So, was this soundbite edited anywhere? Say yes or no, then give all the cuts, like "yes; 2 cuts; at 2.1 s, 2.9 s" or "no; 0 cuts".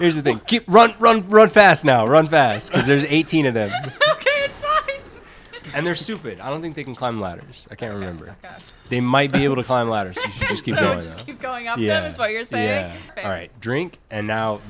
yes; 2 cuts; at 5.6 s, 13.1 s